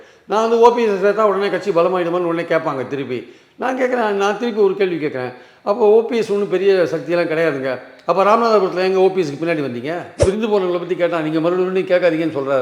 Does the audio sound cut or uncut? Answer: cut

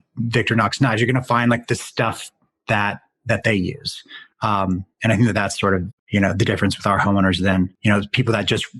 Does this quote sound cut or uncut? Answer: cut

